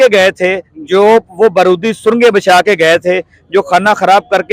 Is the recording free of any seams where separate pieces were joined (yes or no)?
yes